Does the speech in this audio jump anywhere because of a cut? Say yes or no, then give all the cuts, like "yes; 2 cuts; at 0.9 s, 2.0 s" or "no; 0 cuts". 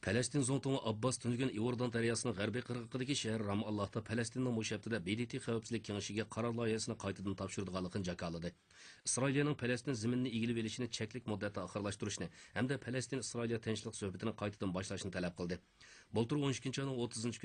no; 0 cuts